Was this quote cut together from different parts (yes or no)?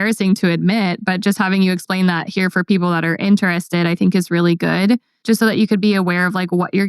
yes